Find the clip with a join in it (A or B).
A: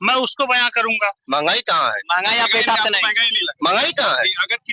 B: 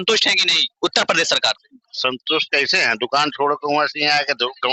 A